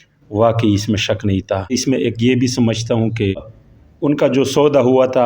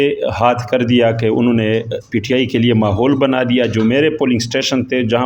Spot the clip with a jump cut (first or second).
first